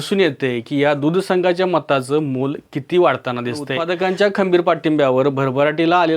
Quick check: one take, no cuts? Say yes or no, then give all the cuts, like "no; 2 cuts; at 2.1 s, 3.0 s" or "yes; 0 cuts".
no; 1 cut; at 3.8 s